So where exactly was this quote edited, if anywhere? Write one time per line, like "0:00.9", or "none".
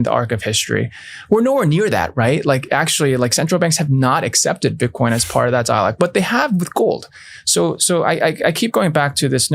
none